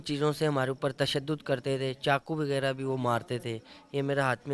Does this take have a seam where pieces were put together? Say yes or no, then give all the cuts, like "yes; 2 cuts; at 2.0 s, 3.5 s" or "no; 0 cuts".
no; 0 cuts